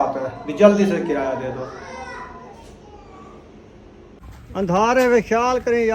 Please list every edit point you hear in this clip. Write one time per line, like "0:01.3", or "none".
0:04.2